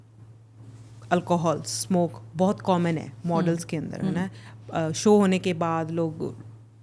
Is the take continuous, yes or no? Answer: yes